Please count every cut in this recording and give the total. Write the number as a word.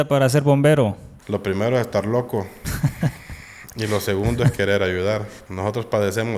two